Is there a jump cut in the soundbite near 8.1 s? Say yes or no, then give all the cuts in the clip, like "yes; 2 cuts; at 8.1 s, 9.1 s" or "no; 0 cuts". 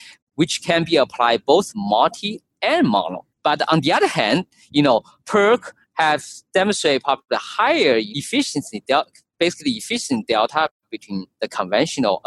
yes; 2 cuts; at 3.3 s, 8.1 s